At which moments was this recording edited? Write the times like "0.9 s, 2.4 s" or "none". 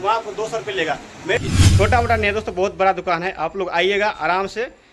1.4 s